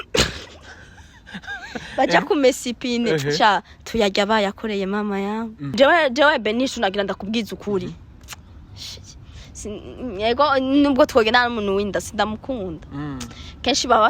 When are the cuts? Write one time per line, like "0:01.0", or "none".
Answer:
0:05.6